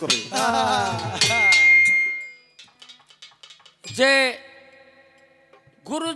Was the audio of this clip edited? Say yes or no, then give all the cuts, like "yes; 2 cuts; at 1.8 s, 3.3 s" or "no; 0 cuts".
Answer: yes; 1 cut; at 2.4 s